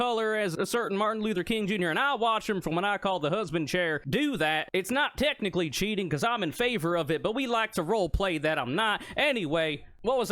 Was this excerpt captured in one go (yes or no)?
yes